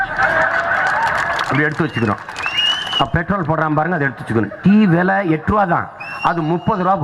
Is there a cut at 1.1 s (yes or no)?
no